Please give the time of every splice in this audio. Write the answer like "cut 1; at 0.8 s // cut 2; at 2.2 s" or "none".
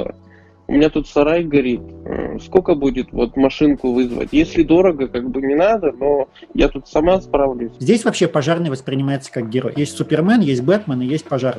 cut 1; at 7.7 s